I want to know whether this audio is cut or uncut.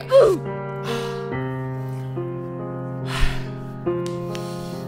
uncut